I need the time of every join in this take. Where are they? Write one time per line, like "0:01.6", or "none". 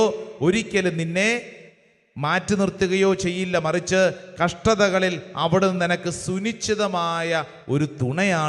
none